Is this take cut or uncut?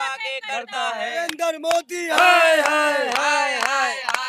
uncut